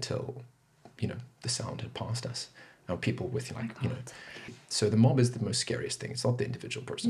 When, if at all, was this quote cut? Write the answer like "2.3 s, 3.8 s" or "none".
4.5 s